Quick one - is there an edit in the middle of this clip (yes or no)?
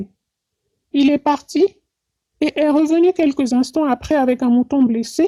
no